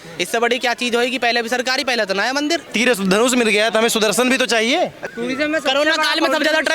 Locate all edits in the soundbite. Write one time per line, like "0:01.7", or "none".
0:02.7
0:05.0